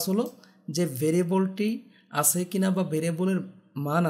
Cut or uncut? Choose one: uncut